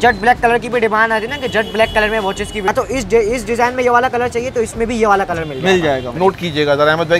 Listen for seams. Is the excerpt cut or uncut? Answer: cut